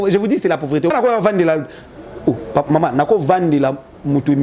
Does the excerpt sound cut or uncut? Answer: cut